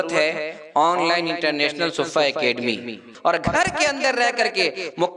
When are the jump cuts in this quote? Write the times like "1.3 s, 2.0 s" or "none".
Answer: 3.1 s